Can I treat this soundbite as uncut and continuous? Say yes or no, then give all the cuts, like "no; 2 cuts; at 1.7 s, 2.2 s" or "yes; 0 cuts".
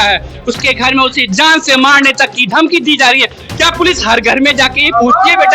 yes; 0 cuts